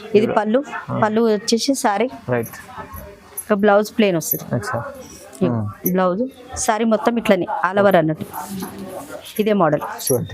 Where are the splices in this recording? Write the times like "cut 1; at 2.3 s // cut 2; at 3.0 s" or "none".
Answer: none